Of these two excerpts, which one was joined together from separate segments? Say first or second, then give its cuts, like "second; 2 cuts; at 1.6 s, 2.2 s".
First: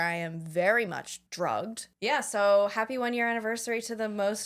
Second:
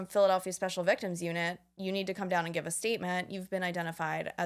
first; 2 cuts; at 1.2 s, 1.9 s